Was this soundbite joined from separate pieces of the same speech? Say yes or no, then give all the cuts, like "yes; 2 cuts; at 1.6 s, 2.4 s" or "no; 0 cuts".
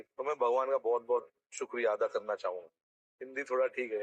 no; 0 cuts